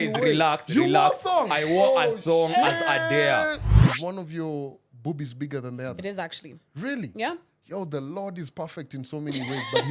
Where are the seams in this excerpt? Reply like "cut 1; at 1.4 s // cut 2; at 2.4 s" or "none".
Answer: cut 1; at 3.7 s